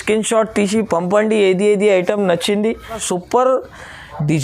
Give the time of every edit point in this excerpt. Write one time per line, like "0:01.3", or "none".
0:03.0